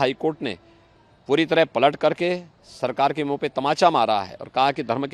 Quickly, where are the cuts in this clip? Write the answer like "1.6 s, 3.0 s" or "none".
none